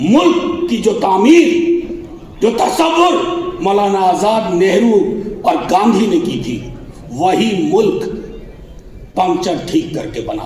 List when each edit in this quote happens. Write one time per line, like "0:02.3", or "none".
none